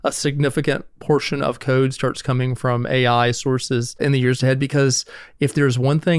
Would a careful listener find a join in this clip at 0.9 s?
yes; 2 cuts; at 0.9 s, 3.9 s

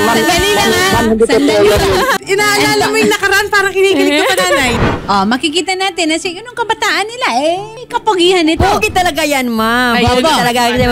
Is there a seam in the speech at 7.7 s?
yes; 3 cuts; at 2.1 s, 4.8 s, 7.7 s

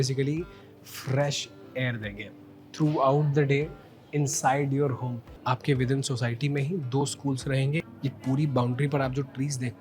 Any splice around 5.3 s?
yes; 2 cuts; at 5.3 s, 7.8 s

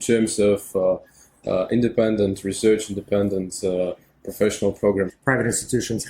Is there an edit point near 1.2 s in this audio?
no; 1 cut; at 5.1 s

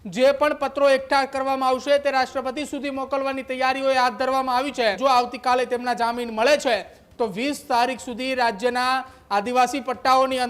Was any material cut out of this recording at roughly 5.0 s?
yes; 1 cut; at 5.0 s

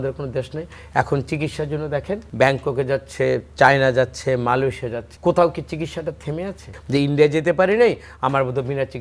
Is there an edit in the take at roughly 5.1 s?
yes; 3 cuts; at 2.3 s, 5.1 s, 6.7 s

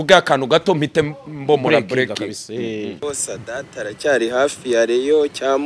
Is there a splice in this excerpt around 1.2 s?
no; 1 cut; at 3.0 s

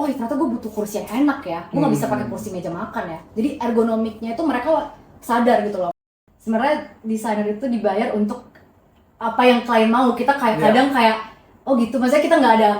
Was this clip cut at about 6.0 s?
yes; 1 cut; at 6.0 s

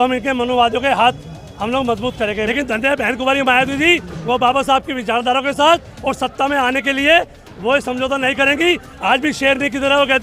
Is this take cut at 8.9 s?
no; 1 cut; at 2.5 s

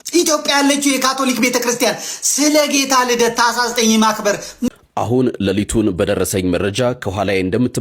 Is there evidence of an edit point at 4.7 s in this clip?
yes; 1 cut; at 4.7 s

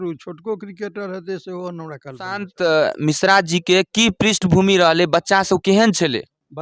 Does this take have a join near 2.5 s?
yes; 1 cut; at 2.5 s

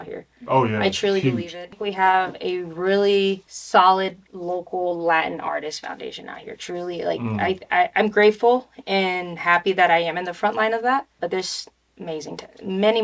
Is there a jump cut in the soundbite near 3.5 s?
yes; 3 cuts; at 1.6 s, 3.5 s, 4.3 s

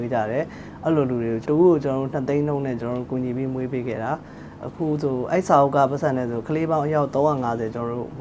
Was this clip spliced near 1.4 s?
yes; 1 cut; at 1.4 s

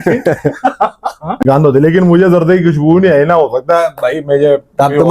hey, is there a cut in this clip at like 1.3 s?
yes; 1 cut; at 1.3 s

